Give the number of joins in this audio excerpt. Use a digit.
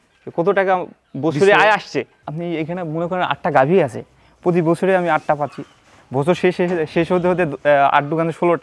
1